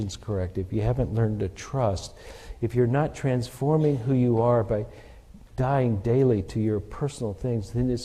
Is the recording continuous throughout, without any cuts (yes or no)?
yes